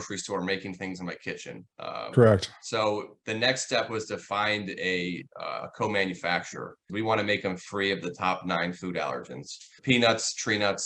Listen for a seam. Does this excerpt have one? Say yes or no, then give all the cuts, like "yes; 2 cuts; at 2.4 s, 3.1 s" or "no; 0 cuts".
yes; 2 cuts; at 6.8 s, 9.7 s